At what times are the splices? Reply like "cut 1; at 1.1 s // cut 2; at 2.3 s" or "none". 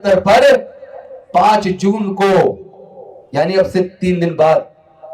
none